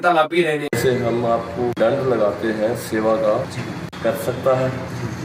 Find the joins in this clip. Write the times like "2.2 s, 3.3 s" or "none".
none

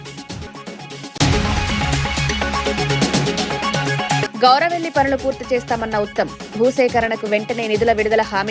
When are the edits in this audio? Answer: 1.2 s, 3.9 s

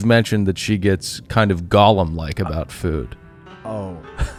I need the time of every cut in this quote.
none

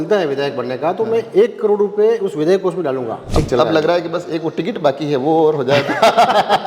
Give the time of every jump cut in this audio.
3.2 s

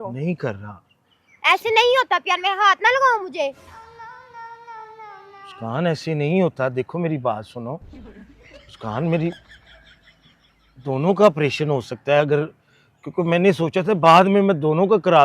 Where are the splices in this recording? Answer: none

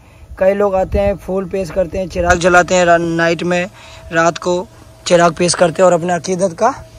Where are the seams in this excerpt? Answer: none

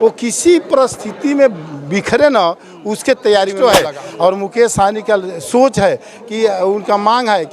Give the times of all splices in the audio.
3.5 s

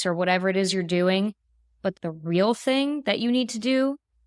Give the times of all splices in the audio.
1.9 s

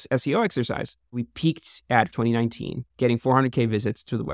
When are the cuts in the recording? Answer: 1.1 s, 2.1 s

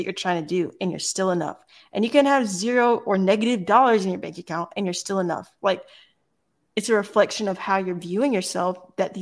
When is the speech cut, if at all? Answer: none

